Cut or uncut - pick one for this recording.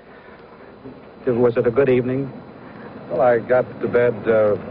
uncut